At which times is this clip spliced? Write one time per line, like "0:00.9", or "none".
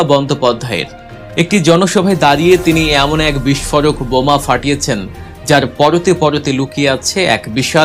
none